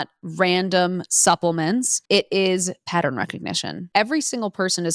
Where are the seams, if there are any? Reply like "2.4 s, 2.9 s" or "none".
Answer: 2.0 s, 3.8 s